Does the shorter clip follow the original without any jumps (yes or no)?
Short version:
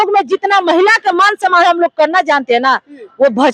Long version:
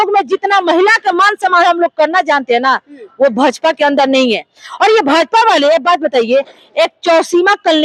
yes